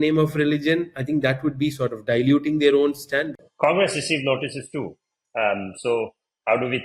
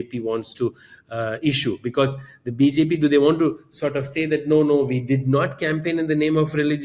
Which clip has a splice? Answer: first; 1 cut; at 3.4 s

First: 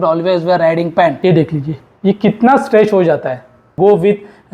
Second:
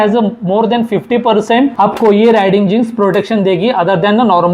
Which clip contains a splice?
first; 2 cuts; at 1.2 s, 3.8 s

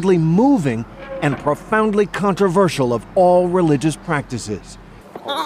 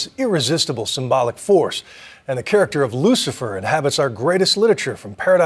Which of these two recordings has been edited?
second; 1 cut; at 2.6 s

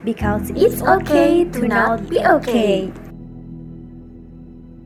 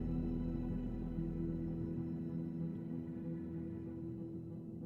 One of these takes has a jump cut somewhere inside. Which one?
second; 1 cut; at 3.9 s

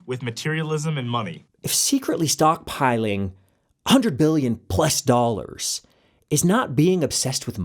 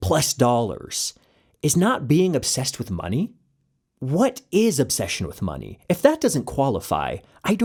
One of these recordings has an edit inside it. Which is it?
first; 1 cut; at 1.4 s

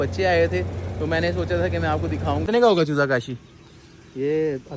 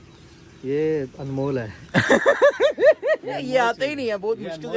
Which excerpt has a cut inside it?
first; 1 cut; at 2.4 s

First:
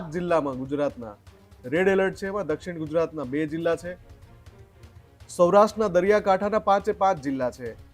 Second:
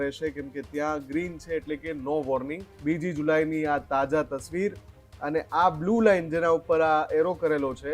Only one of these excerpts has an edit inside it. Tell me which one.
second; 1 cut; at 2.7 s

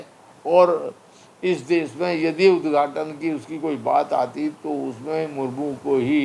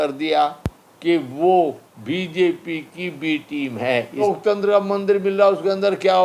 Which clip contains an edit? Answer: second; 1 cut; at 4.2 s

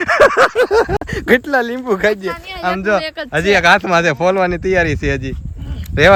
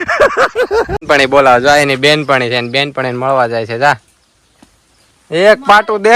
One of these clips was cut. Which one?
second; 1 cut; at 1.0 s

